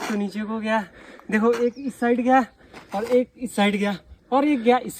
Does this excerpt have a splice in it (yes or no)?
no